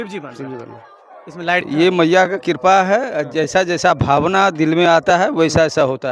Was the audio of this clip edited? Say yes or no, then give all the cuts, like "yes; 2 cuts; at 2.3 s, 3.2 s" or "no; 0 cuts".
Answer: yes; 1 cut; at 1.6 s